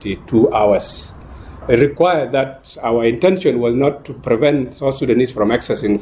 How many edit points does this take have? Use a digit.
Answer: 1